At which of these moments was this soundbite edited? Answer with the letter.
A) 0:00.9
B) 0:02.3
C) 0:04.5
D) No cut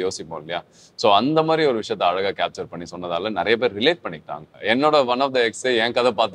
C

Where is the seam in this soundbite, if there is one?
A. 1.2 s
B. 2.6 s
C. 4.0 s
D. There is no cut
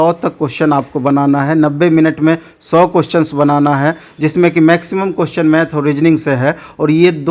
D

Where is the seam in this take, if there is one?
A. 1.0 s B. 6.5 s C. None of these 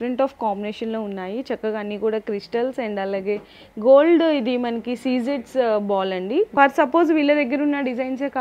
B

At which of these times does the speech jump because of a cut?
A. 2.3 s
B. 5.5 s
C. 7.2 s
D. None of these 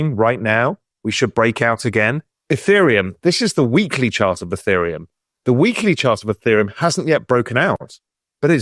A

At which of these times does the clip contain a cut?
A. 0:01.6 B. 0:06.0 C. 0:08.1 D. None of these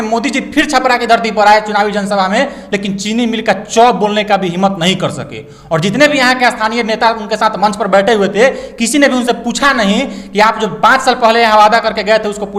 D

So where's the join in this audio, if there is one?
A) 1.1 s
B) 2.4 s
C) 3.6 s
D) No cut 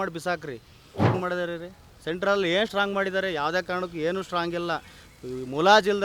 A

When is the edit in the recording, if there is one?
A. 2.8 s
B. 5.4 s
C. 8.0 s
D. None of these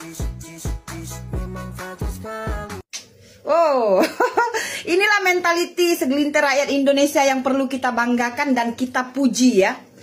D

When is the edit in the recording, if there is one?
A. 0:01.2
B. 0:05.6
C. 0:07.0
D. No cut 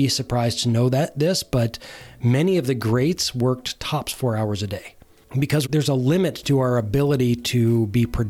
B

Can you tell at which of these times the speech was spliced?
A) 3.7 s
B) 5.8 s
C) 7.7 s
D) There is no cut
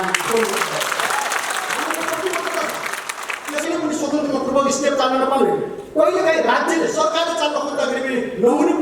A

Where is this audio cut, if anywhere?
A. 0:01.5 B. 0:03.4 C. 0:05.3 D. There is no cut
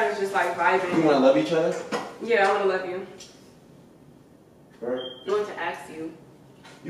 C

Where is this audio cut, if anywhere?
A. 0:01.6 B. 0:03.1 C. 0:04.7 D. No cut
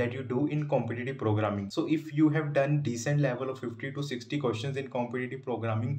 A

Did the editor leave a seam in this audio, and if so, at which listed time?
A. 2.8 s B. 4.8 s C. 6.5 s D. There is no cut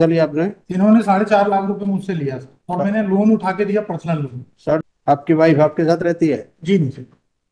B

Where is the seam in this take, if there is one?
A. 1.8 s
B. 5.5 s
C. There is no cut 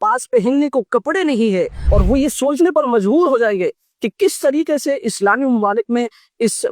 A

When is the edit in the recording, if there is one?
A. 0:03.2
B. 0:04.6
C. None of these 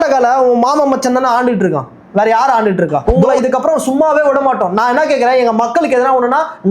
A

